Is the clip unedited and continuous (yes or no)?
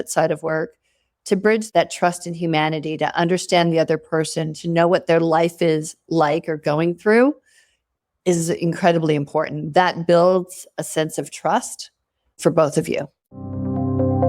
no